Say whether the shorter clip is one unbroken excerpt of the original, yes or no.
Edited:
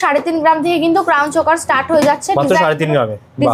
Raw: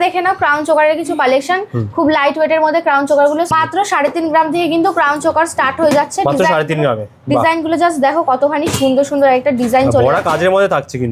yes